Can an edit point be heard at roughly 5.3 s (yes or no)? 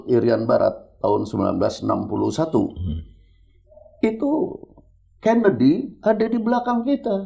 no